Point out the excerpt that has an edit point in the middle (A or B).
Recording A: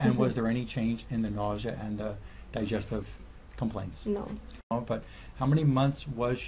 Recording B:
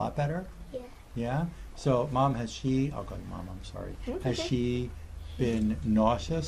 A